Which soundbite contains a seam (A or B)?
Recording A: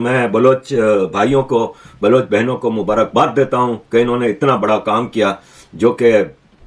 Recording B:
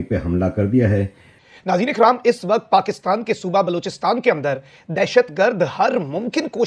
B